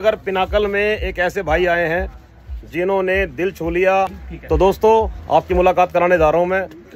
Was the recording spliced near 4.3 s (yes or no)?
yes